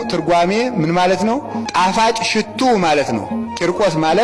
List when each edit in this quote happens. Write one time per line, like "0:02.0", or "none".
0:01.6

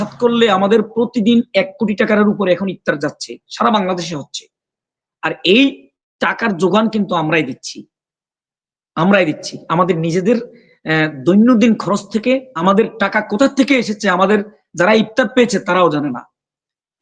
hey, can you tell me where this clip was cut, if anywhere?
0:12.5

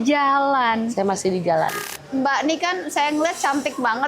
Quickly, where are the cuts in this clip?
0:01.9

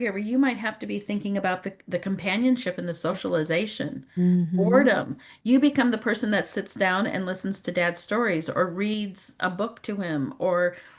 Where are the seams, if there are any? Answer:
none

